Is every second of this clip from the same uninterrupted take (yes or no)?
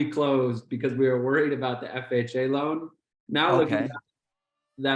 yes